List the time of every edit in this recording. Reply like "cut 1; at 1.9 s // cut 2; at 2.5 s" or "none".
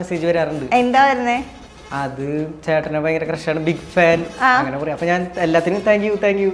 none